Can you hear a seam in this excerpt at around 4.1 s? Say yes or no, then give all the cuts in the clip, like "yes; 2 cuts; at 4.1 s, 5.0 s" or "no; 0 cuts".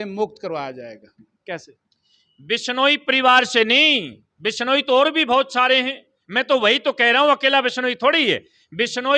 no; 0 cuts